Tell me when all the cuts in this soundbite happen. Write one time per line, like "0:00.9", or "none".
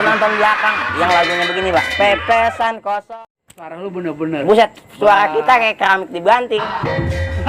0:03.1